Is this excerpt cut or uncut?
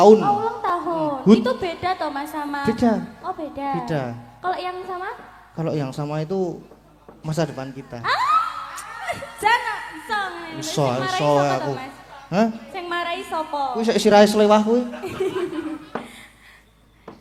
uncut